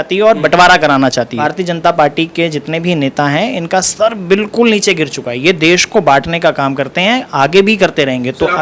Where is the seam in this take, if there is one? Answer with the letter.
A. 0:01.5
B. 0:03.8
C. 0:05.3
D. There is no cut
A